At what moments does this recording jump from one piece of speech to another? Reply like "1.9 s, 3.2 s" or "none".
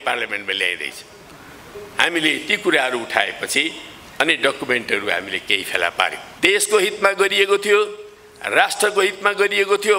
6.2 s